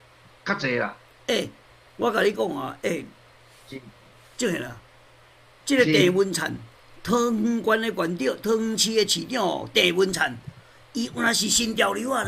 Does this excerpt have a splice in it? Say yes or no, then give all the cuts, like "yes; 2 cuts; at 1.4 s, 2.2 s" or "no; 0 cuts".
no; 0 cuts